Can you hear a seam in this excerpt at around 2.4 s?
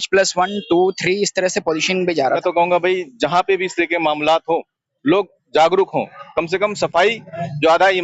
yes; 1 cut; at 2.4 s

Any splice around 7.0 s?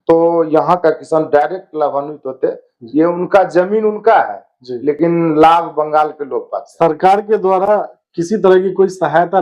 no; 0 cuts

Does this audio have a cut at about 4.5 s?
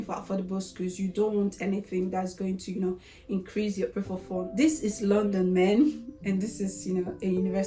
yes; 1 cut; at 4.5 s

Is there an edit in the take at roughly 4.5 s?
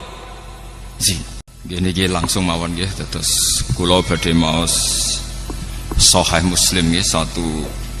no; 1 cut; at 1.5 s

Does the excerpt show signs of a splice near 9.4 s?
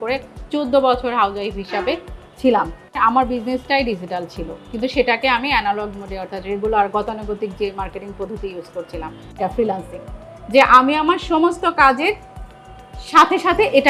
yes; 2 cuts; at 2.8 s, 9.4 s

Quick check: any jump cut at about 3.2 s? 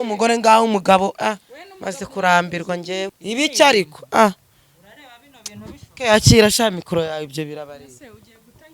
yes; 1 cut; at 3.2 s

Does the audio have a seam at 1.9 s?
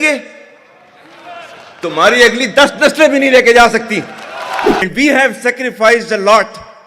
no; 1 cut; at 4.8 s

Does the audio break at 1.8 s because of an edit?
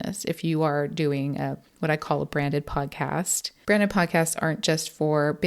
no; 1 cut; at 3.4 s

